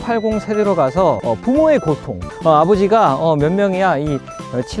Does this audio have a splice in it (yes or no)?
yes